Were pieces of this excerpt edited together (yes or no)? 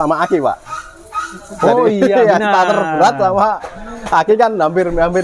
no